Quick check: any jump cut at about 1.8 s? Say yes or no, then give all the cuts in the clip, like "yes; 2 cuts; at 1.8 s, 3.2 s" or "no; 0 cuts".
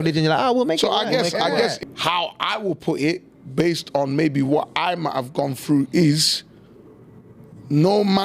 yes; 1 cut; at 1.8 s